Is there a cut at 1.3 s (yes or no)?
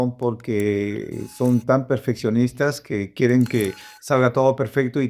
no